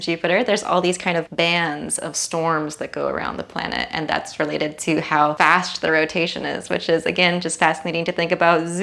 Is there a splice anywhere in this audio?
yes; 2 cuts; at 1.3 s, 5.3 s

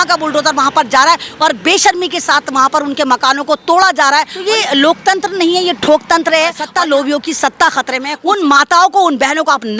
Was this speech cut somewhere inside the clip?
yes; 3 cuts; at 4.4 s, 6.6 s, 8.1 s

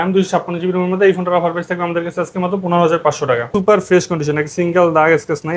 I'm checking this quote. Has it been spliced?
yes; 1 cut; at 3.5 s

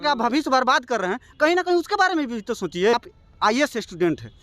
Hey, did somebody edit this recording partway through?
yes; 1 cut; at 2.9 s

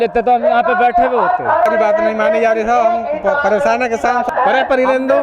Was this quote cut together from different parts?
yes; 2 cuts; at 1.7 s, 4.3 s

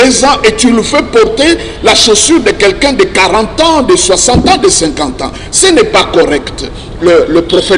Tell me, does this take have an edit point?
yes; 1 cut; at 6.8 s

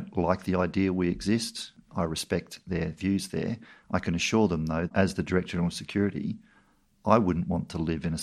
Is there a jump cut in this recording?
yes; 3 cuts; at 1.8 s, 3.7 s, 4.9 s

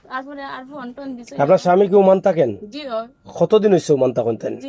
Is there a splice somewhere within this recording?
no; 0 cuts

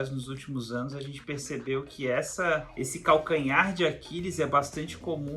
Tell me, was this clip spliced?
yes; 1 cut; at 2.7 s

